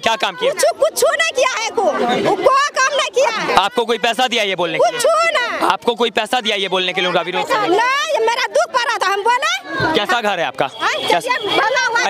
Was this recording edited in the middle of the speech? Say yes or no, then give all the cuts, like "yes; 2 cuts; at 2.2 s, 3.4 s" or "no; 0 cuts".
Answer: no; 0 cuts